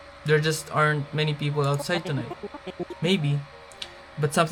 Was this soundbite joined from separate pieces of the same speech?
no; 0 cuts

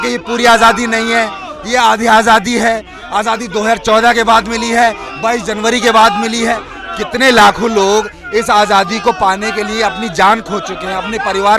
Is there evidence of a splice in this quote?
no; 0 cuts

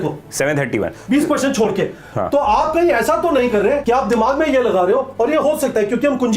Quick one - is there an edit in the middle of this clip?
yes; 1 cut; at 3.8 s

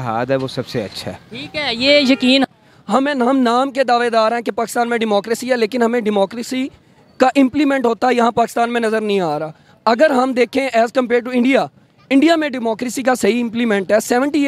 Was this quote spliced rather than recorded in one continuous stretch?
yes; 1 cut; at 2.5 s

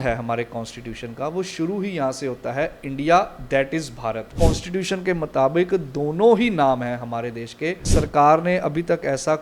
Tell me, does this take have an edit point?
yes; 2 cuts; at 4.3 s, 7.8 s

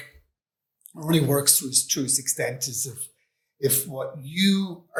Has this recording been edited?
no; 0 cuts

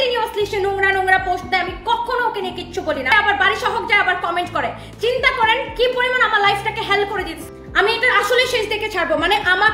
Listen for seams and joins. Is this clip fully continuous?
no; 2 cuts; at 3.1 s, 7.4 s

